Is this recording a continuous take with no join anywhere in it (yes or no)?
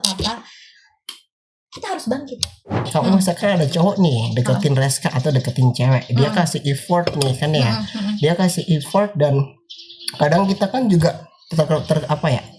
no